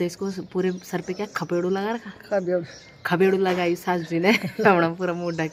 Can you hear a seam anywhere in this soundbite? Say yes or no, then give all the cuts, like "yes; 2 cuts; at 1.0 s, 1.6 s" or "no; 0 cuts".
no; 0 cuts